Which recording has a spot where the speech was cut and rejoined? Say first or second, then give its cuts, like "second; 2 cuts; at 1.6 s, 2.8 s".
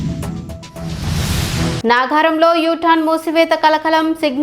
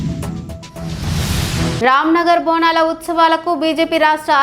second; 1 cut; at 1.8 s